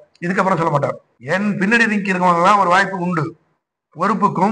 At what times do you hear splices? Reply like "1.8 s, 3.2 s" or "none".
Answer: 1.1 s